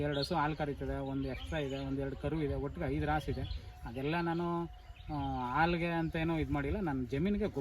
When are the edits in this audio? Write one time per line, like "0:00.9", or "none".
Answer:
none